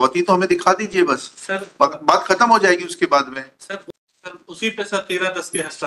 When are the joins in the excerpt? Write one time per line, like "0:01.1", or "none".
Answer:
0:03.8